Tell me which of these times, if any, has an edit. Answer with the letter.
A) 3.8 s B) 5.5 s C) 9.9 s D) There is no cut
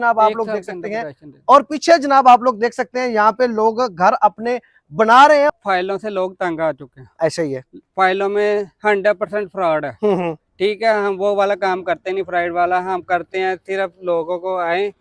B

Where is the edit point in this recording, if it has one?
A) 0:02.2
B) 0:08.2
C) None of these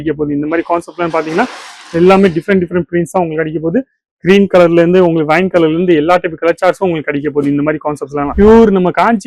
B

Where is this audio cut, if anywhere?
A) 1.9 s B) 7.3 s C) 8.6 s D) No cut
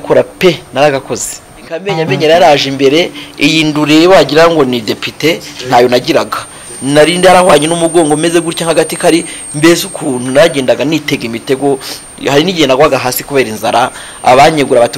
A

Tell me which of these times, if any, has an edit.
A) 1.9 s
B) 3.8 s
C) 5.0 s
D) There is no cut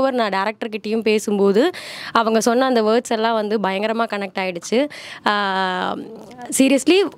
D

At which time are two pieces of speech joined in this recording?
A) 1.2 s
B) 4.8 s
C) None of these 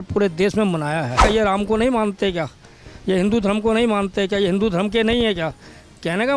A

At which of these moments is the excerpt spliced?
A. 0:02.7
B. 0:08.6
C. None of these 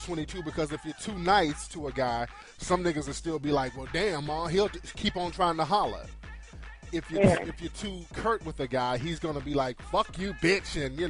B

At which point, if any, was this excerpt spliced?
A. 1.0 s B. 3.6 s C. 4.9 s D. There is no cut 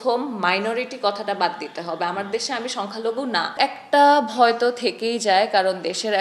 B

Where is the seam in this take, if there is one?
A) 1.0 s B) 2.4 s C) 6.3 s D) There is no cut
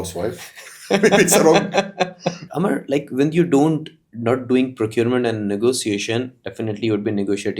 B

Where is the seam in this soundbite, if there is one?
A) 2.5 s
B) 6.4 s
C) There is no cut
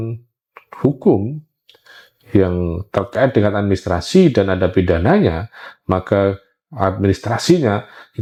C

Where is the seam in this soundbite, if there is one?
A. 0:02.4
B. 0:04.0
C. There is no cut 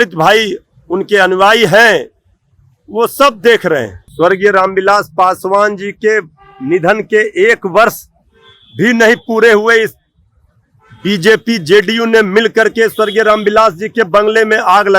B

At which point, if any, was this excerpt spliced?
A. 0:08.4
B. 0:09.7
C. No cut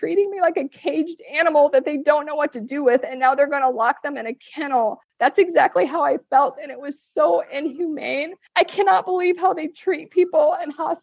A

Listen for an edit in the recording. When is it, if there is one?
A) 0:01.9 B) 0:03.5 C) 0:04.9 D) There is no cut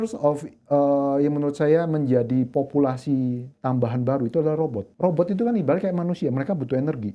C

